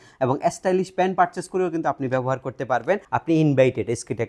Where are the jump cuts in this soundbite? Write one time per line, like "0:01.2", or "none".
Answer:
0:03.0

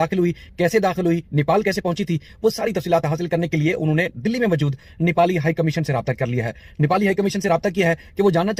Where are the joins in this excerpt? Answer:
none

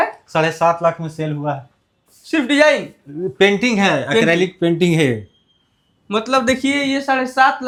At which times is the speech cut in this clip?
none

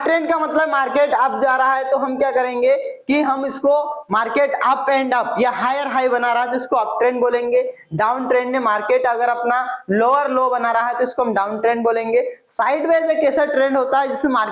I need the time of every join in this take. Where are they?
none

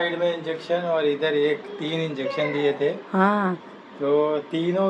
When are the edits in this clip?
none

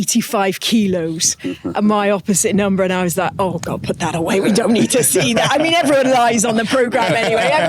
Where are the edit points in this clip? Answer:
none

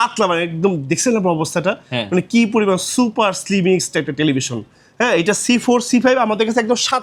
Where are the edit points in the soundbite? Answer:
none

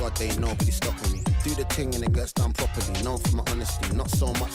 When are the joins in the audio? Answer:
none

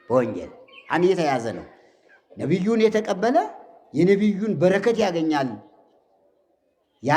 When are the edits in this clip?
none

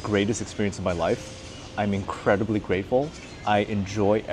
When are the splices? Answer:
none

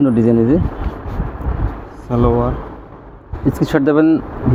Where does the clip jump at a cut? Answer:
none

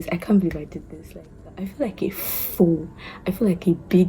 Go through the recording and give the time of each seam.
0:01.7

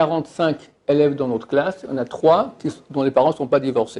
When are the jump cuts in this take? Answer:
none

